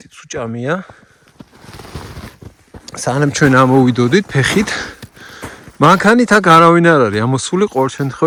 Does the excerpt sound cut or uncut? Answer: uncut